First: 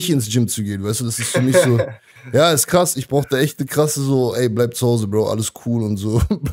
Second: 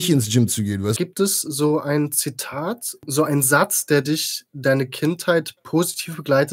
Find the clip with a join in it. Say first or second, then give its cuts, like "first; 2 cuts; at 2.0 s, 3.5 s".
second; 2 cuts; at 1.0 s, 3.1 s